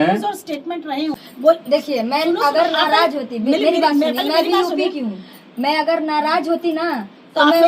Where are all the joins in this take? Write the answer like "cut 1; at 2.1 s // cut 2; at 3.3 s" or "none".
cut 1; at 1.1 s